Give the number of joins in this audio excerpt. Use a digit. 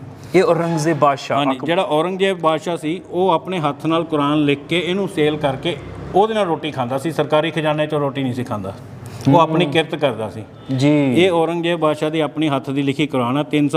0